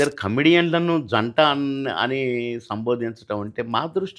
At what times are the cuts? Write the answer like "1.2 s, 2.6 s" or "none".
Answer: none